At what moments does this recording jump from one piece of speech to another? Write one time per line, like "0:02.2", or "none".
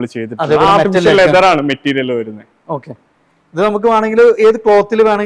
none